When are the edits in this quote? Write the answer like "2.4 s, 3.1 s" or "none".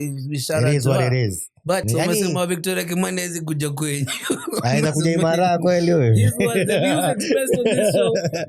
1.9 s